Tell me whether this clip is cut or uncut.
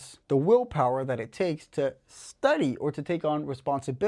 uncut